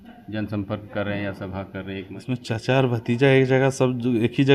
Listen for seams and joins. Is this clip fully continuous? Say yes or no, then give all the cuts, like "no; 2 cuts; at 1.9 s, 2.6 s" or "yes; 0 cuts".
no; 1 cut; at 2.1 s